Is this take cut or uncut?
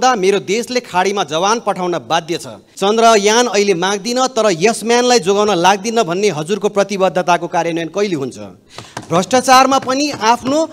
cut